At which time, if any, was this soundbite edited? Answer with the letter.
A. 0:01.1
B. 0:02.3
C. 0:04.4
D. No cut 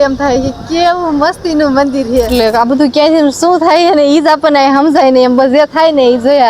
B